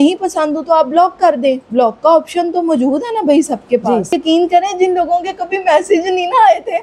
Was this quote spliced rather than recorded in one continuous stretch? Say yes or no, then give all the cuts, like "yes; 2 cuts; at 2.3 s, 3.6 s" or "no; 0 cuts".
yes; 1 cut; at 4.2 s